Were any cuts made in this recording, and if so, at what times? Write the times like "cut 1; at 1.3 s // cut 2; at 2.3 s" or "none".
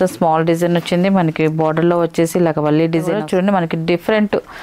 cut 1; at 3.2 s